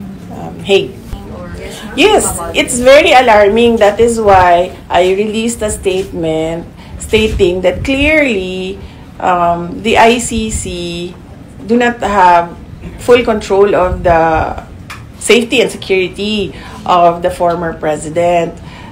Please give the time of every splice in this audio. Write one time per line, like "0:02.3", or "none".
0:01.1